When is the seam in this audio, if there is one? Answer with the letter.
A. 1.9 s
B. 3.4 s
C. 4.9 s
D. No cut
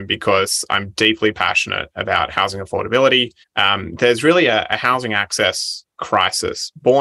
B